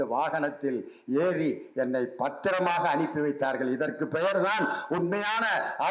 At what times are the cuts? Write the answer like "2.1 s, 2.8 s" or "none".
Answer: none